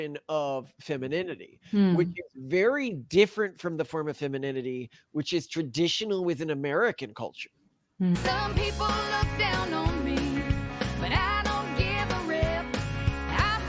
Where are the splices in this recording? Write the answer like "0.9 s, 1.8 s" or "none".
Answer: 8.2 s